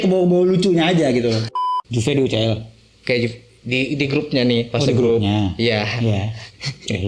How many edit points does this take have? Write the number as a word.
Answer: one